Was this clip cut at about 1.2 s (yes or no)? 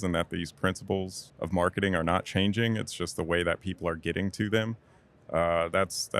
yes